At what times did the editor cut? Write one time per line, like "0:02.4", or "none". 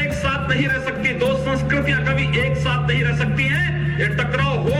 none